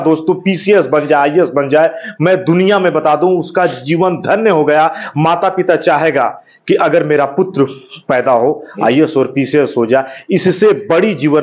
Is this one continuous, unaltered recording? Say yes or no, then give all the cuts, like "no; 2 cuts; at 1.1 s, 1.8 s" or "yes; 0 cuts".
yes; 0 cuts